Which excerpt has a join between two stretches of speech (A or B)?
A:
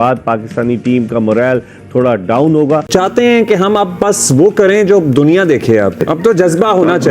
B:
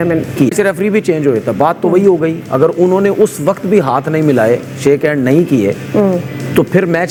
A